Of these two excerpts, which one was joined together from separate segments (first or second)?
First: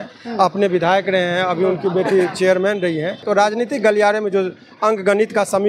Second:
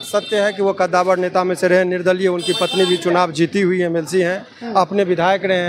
first